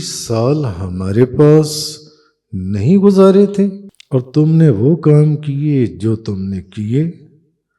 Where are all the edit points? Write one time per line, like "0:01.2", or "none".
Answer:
0:03.9